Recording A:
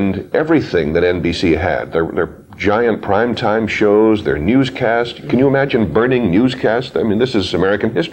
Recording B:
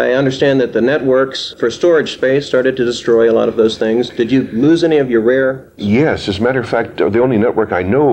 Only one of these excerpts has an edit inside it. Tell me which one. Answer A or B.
B